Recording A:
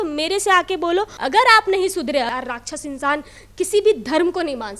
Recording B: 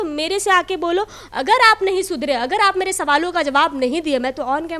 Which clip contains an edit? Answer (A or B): A